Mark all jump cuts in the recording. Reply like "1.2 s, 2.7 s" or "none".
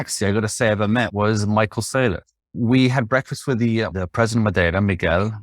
1.1 s, 2.6 s, 3.9 s